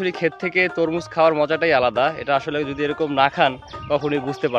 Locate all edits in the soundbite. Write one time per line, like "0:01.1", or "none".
none